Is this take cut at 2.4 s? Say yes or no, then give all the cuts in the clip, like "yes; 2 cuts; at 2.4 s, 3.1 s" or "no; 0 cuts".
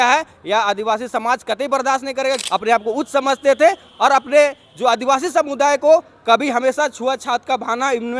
yes; 1 cut; at 2.4 s